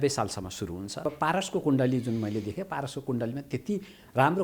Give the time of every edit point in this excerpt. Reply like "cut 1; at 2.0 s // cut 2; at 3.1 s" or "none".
cut 1; at 1.0 s